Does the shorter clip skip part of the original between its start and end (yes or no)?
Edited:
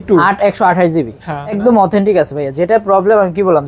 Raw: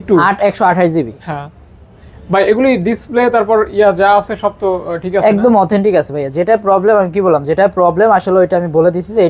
yes